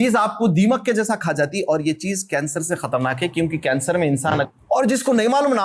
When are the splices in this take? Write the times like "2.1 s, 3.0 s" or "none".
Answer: 4.4 s